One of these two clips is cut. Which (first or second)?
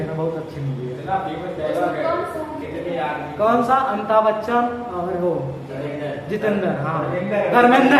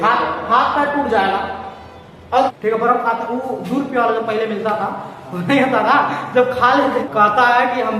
second